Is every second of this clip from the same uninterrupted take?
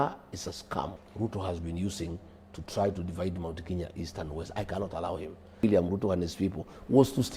no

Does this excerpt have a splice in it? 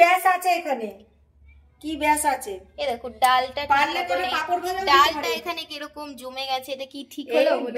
no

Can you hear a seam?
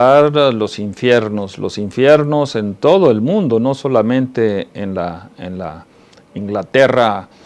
yes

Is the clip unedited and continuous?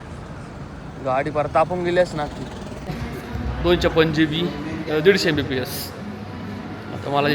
no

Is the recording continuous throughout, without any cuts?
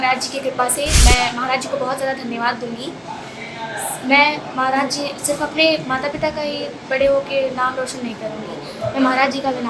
no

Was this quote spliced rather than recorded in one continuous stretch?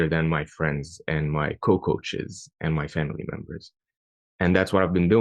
no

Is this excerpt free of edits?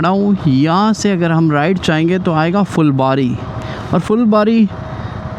yes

